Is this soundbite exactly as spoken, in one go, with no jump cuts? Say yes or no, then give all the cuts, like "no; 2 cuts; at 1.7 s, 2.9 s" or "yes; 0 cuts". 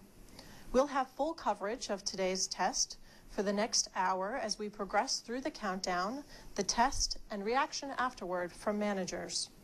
yes; 0 cuts